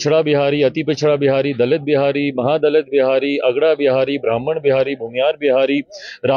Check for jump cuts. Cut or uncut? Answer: uncut